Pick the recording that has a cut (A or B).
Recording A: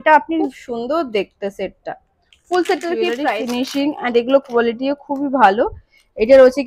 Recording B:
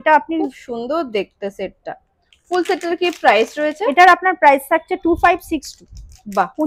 A